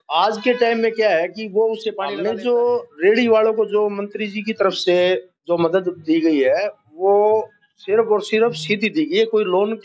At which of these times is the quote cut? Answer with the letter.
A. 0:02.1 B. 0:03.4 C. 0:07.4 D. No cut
A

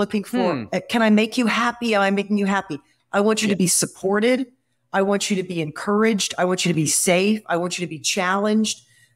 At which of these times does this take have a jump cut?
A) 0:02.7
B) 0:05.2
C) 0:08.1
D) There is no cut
D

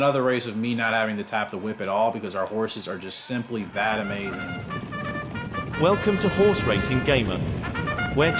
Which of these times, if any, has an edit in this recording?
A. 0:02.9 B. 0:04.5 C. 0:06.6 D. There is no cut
B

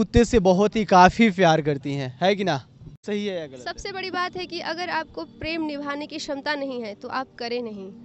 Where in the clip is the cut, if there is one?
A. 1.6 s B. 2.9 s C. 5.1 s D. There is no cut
B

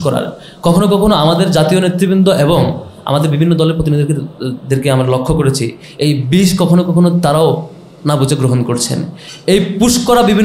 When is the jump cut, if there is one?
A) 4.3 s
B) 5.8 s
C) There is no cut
C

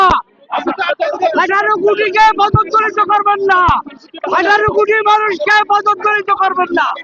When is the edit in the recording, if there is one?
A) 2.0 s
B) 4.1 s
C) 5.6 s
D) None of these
D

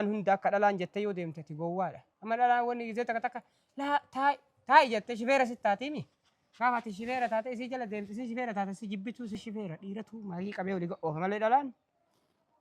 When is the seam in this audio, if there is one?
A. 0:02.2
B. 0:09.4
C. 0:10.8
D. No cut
B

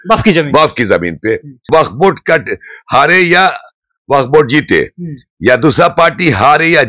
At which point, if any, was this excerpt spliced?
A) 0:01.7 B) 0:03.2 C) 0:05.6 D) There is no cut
A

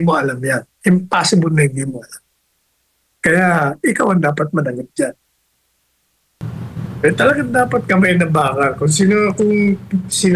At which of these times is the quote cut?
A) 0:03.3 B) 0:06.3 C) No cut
C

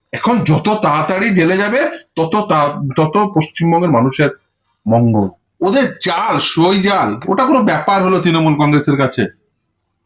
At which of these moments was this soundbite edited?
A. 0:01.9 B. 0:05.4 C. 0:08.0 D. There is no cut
B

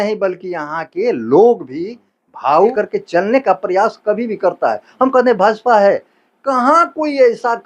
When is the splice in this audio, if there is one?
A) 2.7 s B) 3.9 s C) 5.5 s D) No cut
A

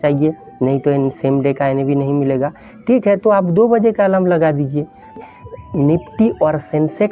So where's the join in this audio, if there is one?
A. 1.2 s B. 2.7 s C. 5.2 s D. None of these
C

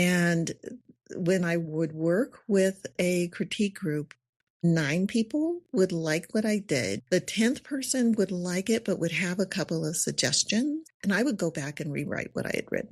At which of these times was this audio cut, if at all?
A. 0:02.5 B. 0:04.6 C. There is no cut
B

